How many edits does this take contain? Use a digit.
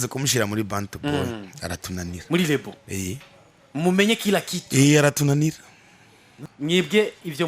1